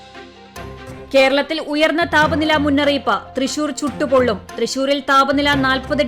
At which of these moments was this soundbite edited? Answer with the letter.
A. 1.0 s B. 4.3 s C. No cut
A